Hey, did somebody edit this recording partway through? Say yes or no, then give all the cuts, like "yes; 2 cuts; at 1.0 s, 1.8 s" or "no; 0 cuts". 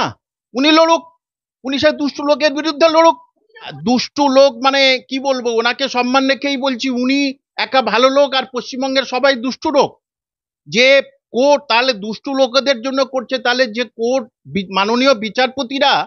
yes; 1 cut; at 3.7 s